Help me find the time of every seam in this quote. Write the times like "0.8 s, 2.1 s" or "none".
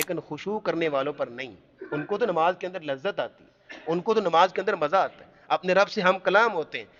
none